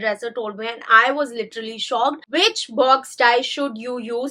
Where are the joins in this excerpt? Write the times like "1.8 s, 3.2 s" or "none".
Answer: 2.2 s